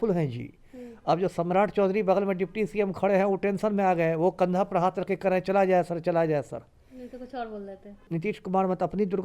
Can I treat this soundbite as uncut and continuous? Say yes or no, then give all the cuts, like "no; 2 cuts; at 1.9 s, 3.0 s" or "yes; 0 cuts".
no; 1 cut; at 8.0 s